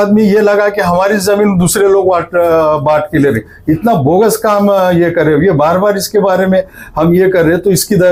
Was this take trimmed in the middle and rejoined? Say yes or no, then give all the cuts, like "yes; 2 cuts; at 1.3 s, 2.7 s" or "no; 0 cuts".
no; 0 cuts